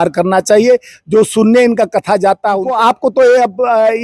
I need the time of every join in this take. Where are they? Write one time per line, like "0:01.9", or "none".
0:02.7

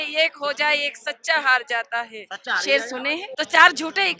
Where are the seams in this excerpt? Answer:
0:03.3

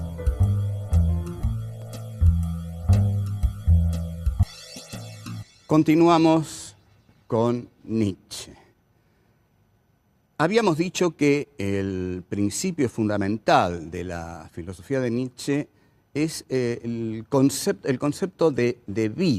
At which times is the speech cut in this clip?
0:06.2

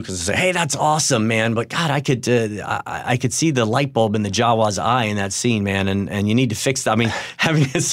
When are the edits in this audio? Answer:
none

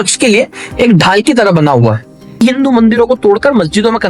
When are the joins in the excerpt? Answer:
0:02.4

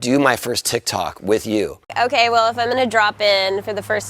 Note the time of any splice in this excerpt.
0:01.8

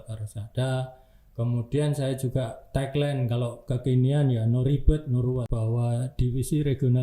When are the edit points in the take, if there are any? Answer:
0:05.4

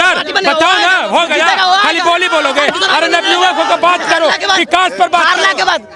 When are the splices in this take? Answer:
none

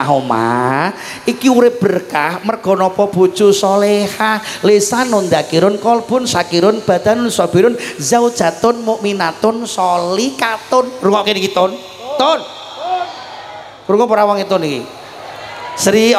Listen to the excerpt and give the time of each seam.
none

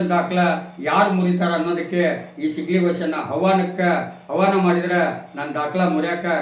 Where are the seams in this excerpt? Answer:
none

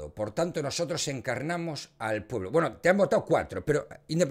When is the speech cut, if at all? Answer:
none

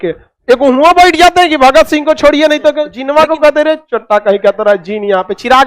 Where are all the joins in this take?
0:02.9

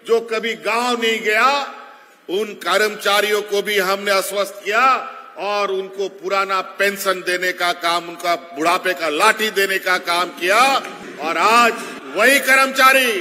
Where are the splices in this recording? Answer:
0:11.0
0:11.9

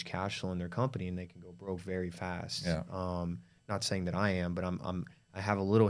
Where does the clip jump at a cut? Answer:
none

